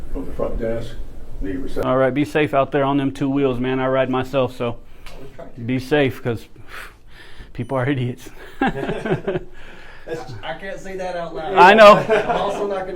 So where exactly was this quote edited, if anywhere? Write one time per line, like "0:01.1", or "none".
0:01.8